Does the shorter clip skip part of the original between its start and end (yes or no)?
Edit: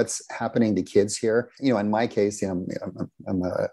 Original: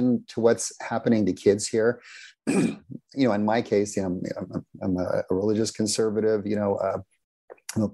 yes